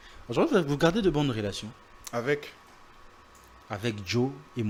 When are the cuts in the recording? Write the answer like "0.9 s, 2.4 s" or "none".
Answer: none